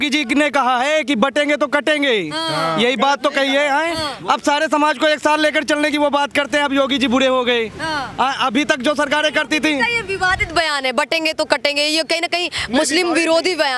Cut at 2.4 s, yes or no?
no